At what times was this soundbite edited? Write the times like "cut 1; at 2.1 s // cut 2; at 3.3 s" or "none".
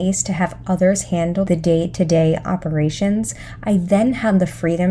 none